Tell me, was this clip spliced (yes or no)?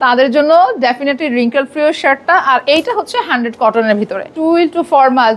yes